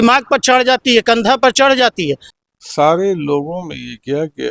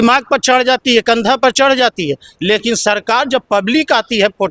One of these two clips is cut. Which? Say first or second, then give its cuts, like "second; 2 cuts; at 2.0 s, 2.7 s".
first; 1 cut; at 2.3 s